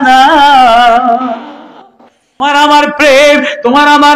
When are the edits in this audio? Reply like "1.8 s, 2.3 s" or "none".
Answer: 2.4 s